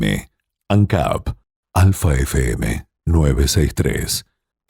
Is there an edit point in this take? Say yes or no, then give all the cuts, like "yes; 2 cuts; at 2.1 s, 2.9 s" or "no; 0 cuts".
no; 0 cuts